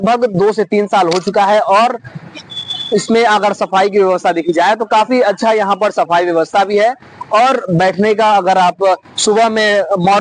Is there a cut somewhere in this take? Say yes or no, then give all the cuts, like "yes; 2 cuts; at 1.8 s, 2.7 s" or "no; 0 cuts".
no; 0 cuts